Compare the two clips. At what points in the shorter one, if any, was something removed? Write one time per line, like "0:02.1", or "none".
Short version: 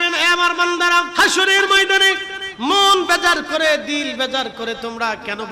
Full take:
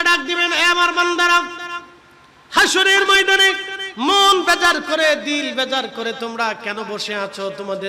0:01.1